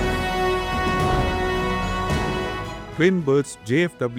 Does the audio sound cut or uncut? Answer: uncut